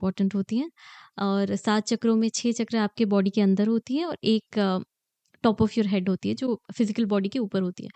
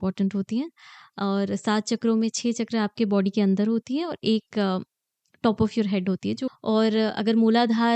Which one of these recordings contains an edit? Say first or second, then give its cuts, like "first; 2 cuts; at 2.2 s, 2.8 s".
second; 1 cut; at 6.5 s